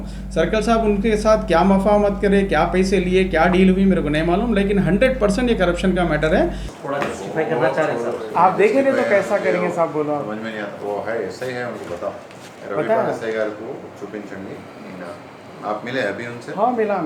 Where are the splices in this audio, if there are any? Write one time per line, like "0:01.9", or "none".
0:06.7